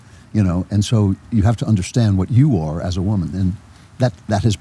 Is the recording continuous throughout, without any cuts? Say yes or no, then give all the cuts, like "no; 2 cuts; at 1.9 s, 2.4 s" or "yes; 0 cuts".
yes; 0 cuts